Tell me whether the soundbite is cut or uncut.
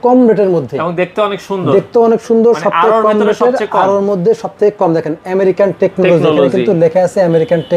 uncut